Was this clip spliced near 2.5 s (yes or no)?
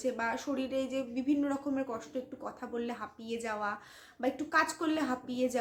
no